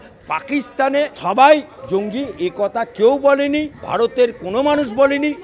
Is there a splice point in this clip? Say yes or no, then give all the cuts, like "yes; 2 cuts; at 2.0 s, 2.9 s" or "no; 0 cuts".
yes; 2 cuts; at 1.2 s, 3.8 s